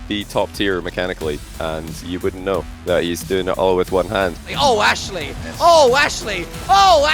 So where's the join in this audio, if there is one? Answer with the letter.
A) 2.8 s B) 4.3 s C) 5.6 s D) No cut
B